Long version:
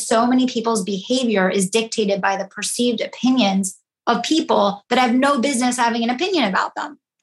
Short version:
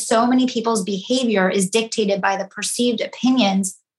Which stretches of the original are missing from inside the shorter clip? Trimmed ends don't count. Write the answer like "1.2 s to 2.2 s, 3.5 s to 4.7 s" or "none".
none